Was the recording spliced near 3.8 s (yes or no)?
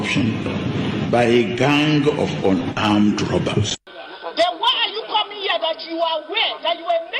yes